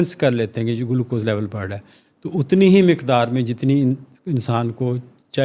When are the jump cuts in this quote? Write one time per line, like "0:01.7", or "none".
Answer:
none